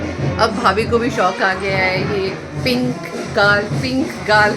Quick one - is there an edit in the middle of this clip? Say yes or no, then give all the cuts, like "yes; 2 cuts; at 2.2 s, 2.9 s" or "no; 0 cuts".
no; 0 cuts